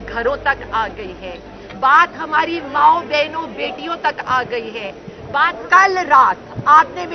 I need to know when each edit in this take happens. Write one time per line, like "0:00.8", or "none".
0:05.4